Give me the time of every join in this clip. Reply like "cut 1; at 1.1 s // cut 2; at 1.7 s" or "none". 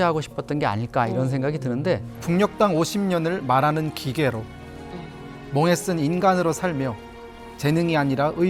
cut 1; at 2.1 s